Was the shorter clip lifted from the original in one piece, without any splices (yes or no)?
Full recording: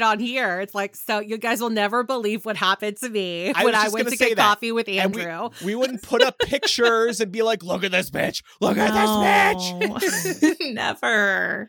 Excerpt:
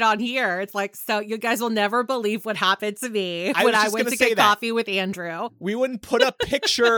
yes